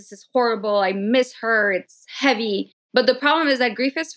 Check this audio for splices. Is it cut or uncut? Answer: cut